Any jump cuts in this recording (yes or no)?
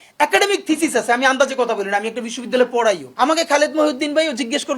yes